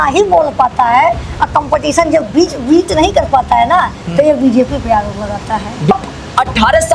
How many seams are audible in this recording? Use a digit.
1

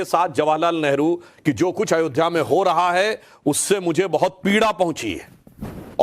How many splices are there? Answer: 1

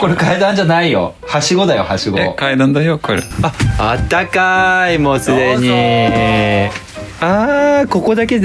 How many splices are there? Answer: 1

